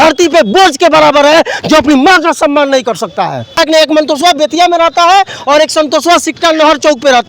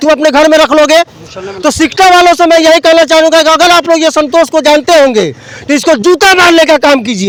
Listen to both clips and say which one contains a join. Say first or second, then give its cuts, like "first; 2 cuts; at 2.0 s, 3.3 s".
first; 1 cut; at 3.6 s